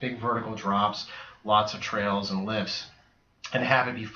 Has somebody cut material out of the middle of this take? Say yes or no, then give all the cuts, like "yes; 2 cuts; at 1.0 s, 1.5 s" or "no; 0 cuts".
no; 0 cuts